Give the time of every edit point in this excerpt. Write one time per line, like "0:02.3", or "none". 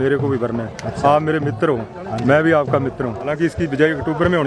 0:03.3